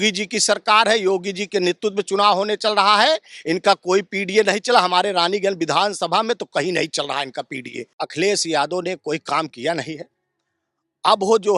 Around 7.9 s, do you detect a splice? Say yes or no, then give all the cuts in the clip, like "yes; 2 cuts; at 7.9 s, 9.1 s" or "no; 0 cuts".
yes; 1 cut; at 7.9 s